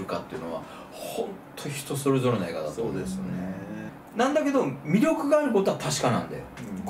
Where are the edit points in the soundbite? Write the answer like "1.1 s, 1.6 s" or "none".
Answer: 3.9 s